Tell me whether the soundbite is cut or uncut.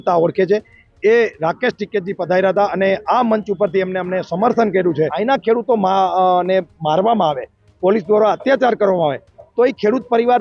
cut